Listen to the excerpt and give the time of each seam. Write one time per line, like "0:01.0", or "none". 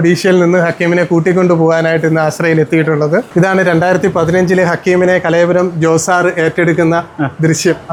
none